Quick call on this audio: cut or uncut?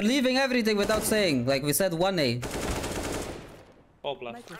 uncut